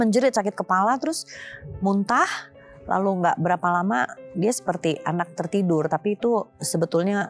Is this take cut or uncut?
uncut